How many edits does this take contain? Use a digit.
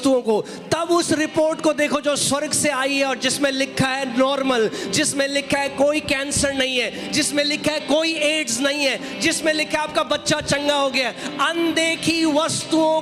0